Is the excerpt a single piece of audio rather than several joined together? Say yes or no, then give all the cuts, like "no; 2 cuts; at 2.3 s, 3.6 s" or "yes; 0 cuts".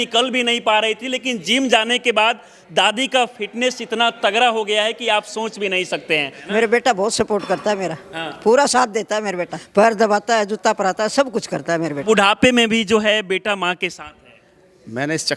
no; 3 cuts; at 6.4 s, 9.6 s, 12.0 s